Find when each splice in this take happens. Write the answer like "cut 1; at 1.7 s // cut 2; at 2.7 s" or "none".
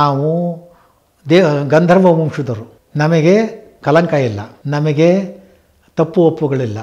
cut 1; at 4.5 s